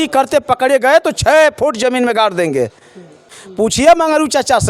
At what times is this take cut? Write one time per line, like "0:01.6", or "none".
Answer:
0:03.3

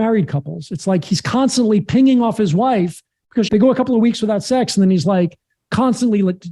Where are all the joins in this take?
0:03.5

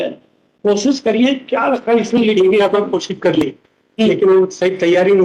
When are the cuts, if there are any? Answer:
none

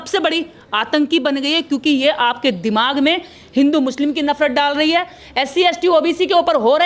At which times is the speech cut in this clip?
none

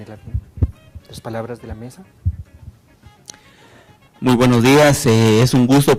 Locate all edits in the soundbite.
none

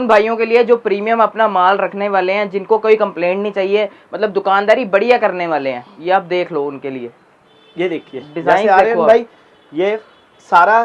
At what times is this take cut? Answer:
none

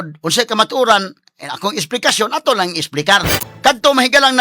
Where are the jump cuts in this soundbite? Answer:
0:03.4

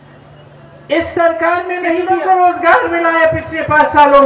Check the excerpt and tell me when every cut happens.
0:02.0

